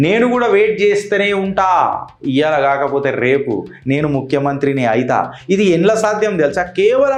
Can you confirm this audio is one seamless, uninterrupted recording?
yes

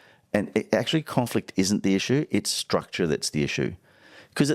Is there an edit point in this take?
no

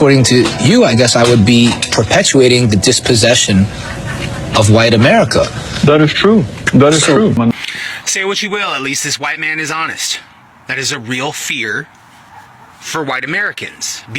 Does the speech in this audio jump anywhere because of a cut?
yes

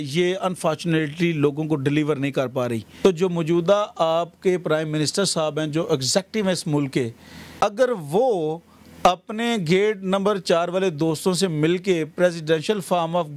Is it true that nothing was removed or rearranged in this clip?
no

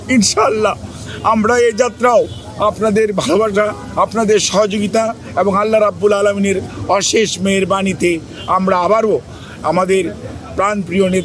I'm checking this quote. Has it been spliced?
no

